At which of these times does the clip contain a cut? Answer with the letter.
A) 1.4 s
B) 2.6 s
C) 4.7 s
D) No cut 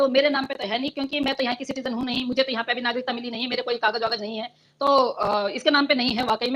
D